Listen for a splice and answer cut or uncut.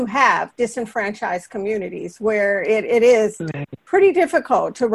uncut